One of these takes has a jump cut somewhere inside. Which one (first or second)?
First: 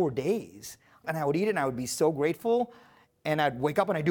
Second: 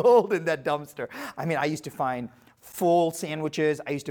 first